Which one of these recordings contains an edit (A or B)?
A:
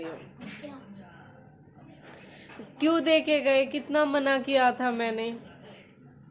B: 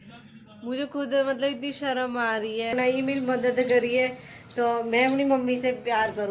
B